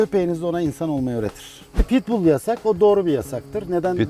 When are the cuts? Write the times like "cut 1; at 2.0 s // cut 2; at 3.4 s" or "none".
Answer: cut 1; at 1.8 s